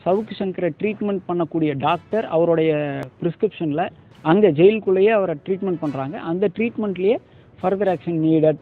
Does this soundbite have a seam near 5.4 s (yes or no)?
no